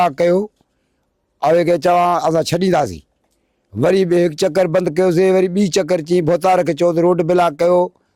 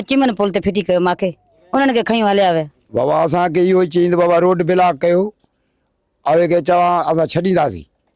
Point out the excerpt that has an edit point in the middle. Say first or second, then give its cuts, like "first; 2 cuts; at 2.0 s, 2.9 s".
second; 1 cut; at 2.8 s